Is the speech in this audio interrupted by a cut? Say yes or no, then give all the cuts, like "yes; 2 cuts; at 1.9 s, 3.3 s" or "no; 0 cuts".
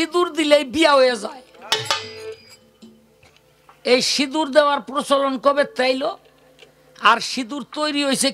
no; 0 cuts